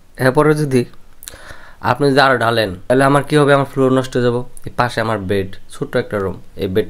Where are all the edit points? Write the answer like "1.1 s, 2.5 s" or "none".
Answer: 2.8 s

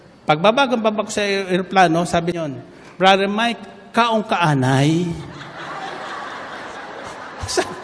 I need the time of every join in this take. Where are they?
2.4 s

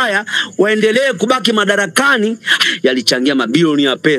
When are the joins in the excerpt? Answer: 2.6 s

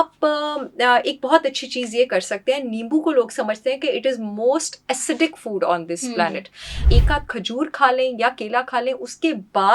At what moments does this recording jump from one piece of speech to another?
6.8 s

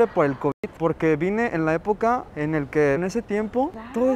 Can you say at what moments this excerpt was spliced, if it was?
3.0 s

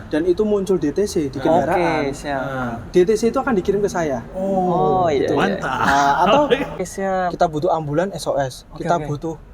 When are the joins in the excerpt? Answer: 6.8 s

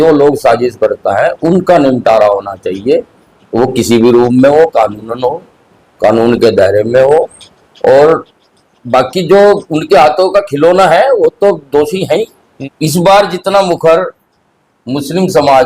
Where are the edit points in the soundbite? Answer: 12.4 s

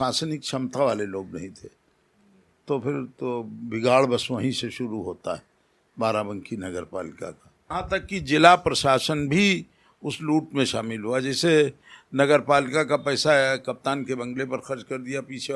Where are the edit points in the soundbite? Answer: 7.5 s

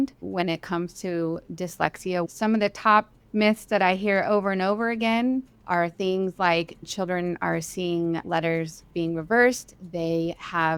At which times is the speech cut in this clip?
2.3 s, 6.9 s, 8.2 s

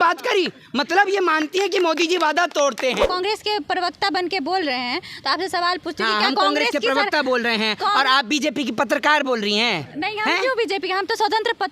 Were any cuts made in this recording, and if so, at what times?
3.1 s

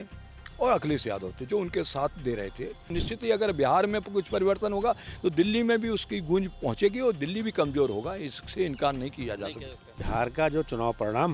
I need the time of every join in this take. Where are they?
3.0 s, 10.0 s

